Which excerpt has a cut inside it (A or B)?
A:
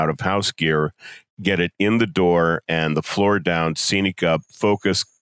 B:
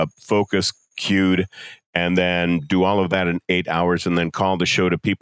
A